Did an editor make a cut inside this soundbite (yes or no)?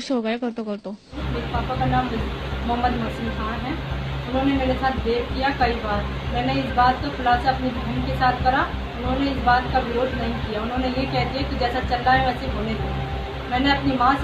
yes